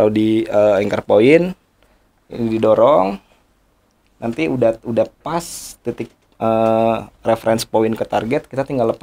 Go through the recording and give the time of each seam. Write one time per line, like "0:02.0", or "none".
none